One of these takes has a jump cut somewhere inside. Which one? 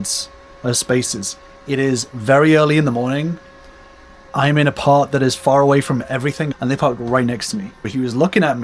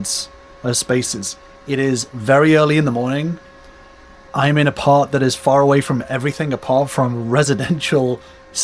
first; 2 cuts; at 6.5 s, 7.9 s

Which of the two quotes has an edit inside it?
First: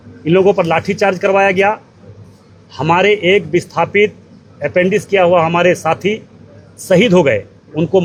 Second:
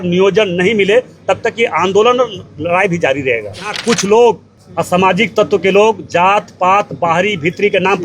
second; 2 cuts; at 3.7 s, 4.5 s

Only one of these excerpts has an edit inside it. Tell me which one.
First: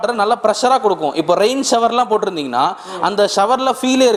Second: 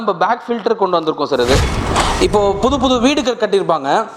second; 1 cut; at 1.8 s

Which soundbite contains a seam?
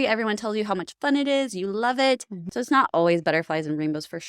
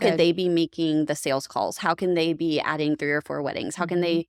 first; 1 cut; at 2.5 s

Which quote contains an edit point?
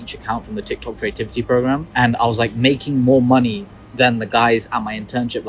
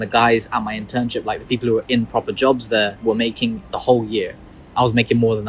first; 1 cut; at 1.9 s

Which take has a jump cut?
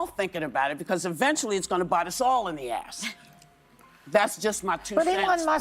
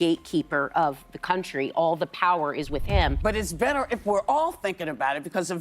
second; 1 cut; at 3.2 s

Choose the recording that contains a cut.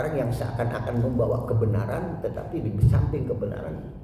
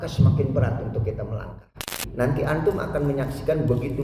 second; 1 cut; at 2.0 s

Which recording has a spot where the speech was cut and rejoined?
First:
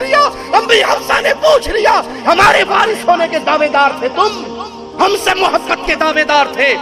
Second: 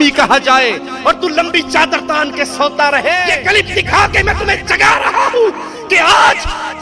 second; 1 cut; at 3.3 s

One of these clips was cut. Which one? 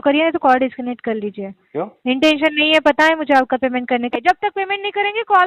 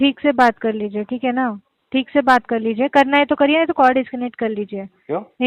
first; 1 cut; at 4.1 s

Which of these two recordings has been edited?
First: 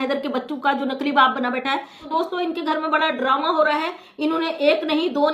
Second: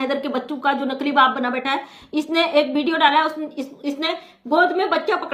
first; 1 cut; at 2.0 s

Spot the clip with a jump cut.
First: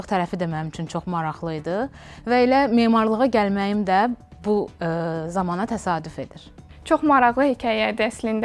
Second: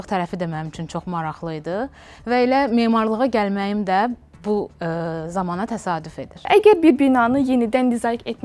second; 1 cut; at 6.5 s

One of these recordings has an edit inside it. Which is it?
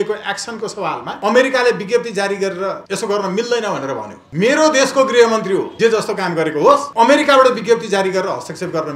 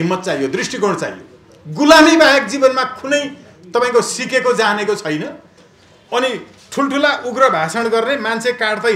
first; 5 cuts; at 1.1 s, 2.9 s, 4.2 s, 5.7 s, 6.9 s

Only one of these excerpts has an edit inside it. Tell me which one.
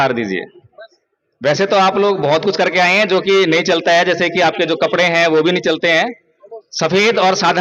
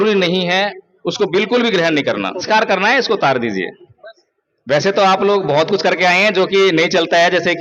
second; 1 cut; at 2.4 s

